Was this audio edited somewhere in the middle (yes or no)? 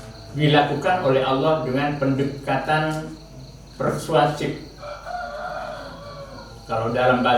no